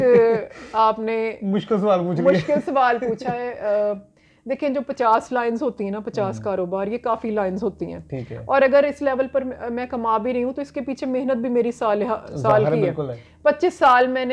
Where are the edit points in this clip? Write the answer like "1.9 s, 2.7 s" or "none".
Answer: none